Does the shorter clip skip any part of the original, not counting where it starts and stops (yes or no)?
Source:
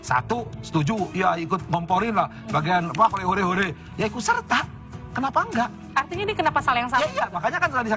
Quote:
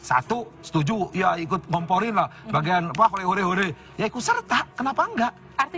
yes